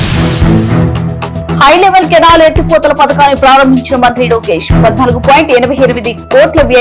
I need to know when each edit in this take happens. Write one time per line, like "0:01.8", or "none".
0:00.9